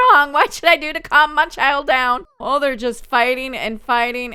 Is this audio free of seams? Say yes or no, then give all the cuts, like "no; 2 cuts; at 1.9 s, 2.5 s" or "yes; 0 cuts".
yes; 0 cuts